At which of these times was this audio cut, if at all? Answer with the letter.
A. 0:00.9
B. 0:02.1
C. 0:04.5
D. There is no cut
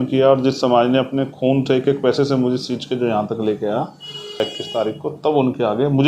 C